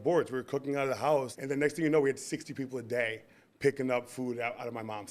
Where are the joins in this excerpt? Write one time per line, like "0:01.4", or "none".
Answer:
0:01.4